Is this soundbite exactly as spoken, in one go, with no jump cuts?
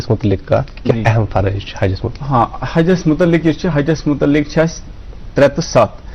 no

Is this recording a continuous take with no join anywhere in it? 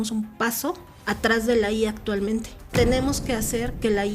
no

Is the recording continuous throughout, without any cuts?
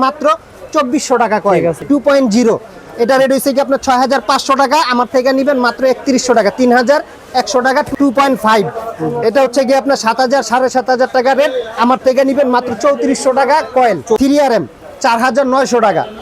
no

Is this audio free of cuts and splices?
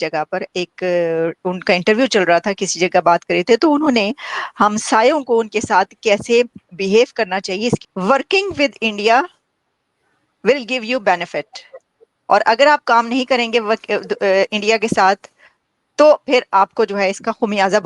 no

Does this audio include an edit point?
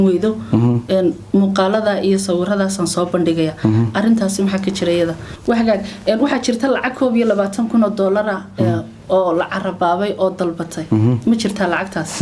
yes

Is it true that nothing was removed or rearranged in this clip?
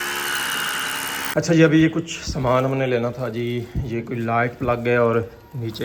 yes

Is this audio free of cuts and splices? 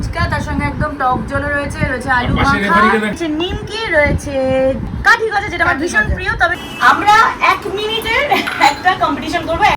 no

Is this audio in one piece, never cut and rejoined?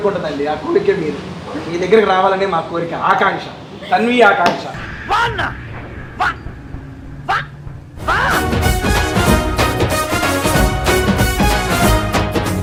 yes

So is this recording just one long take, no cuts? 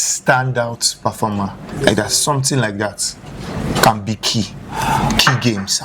yes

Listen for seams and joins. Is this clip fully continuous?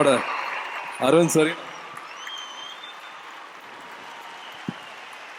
yes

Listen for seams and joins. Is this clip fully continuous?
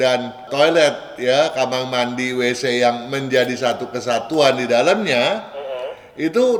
yes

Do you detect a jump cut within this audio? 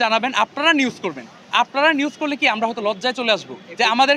no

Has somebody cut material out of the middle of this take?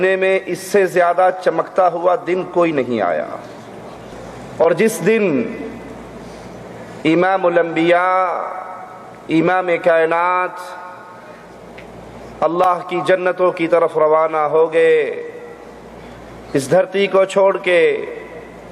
yes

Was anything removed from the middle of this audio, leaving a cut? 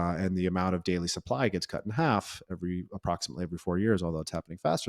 no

